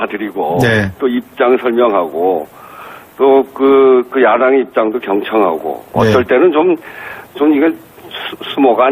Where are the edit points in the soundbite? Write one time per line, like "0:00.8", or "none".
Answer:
0:04.7